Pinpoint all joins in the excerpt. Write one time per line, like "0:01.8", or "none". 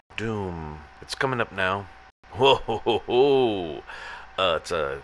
none

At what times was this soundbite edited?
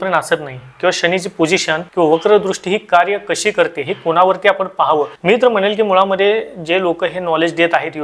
0:01.9
0:05.1

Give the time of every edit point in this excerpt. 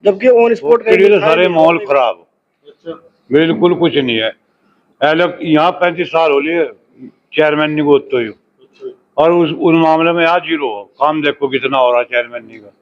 0:00.9

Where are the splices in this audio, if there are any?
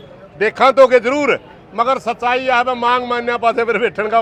none

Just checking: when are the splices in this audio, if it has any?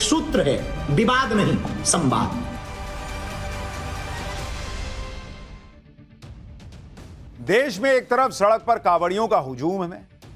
none

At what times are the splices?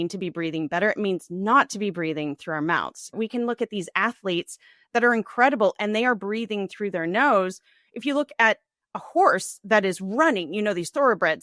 0:03.1

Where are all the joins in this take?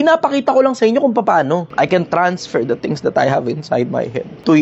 0:01.7

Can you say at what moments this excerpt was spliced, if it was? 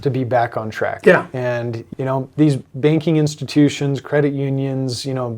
0:01.9

